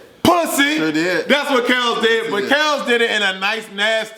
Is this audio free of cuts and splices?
yes; 0 cuts

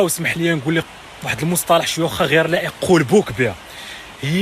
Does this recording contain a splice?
no; 0 cuts

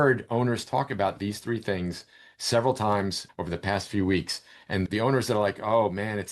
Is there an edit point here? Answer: yes; 1 cut; at 3.2 s

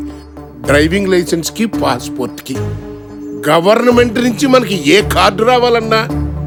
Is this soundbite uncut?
yes; 0 cuts

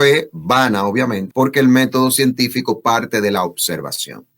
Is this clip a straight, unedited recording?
no; 1 cut; at 1.2 s

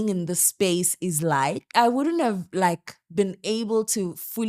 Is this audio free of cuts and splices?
no; 1 cut; at 1.7 s

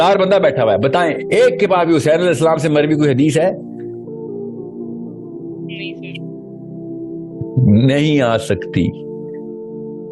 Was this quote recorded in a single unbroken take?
no; 3 cuts; at 3.5 s, 5.6 s, 7.6 s

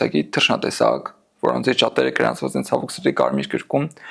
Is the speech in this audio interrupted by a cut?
no; 0 cuts

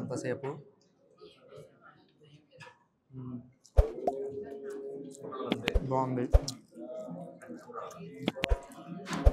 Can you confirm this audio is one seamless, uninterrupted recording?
yes; 0 cuts

